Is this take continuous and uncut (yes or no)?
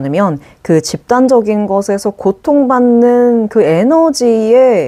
yes